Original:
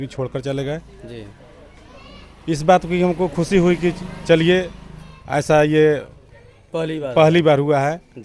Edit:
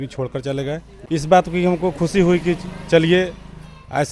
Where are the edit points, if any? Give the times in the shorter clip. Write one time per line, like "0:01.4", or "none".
0:00.9